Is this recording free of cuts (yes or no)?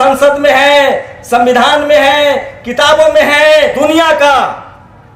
no